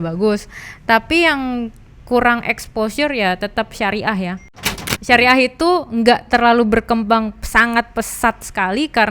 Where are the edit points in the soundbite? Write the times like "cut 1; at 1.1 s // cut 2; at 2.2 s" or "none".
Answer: cut 1; at 4.7 s